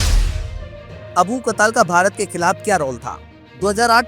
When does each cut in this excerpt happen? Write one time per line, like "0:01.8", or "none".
0:01.0

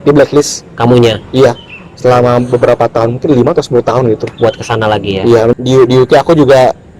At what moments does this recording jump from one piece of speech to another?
0:05.5

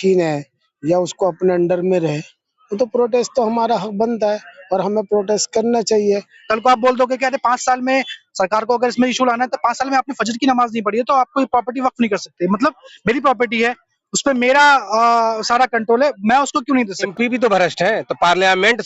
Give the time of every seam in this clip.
0:06.3
0:17.1

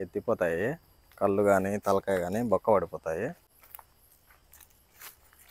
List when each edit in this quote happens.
0:03.5

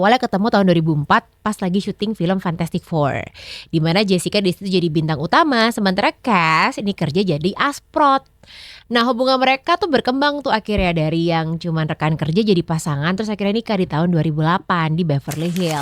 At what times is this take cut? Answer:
none

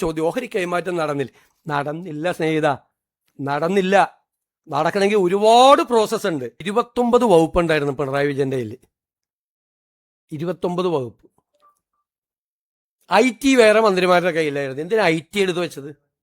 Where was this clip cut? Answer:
0:06.6

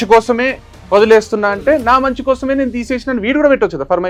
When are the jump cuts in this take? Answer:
none

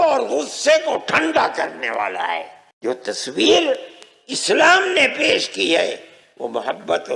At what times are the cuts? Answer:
0:02.6

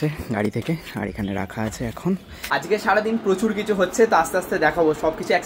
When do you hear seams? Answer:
0:02.5

